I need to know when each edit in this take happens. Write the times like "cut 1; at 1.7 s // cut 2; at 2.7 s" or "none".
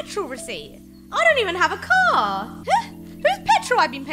cut 1; at 2.5 s